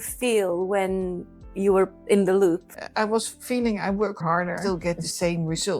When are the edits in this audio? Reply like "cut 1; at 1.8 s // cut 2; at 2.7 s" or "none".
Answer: cut 1; at 2.8 s // cut 2; at 4.6 s